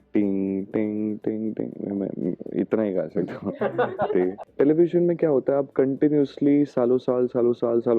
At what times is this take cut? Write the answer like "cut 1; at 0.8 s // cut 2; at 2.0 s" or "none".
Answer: cut 1; at 4.4 s